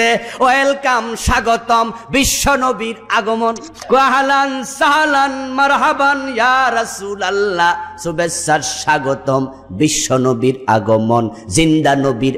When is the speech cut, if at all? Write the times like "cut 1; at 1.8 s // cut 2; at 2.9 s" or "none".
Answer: cut 1; at 3.7 s